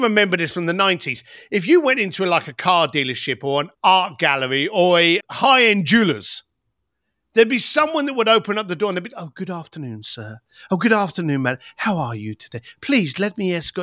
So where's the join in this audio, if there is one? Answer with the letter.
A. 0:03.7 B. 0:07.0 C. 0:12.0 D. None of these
A